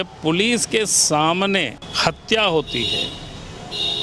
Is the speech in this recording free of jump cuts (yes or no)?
no